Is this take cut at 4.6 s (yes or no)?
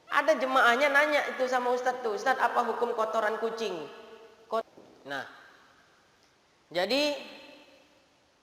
yes